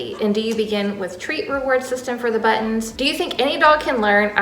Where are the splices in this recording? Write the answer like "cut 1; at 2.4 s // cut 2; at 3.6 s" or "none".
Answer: cut 1; at 2.9 s